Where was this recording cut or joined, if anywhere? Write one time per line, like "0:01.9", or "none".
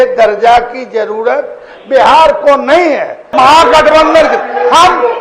0:03.2